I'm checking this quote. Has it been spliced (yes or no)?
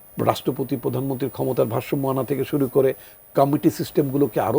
no